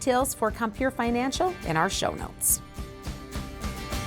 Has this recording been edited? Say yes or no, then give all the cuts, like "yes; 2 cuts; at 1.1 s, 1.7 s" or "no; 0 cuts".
yes; 1 cut; at 2.4 s